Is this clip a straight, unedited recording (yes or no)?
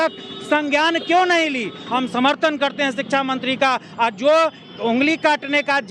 no